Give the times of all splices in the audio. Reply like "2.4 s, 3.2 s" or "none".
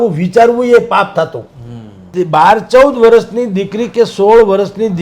2.0 s